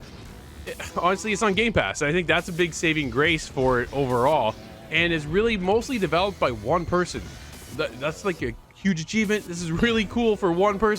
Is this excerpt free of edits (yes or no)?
yes